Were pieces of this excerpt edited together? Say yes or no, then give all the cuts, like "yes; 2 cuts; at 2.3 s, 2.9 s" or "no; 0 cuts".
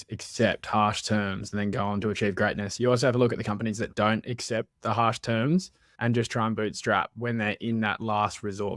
no; 0 cuts